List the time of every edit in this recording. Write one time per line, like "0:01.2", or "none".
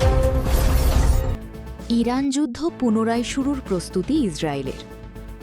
0:01.6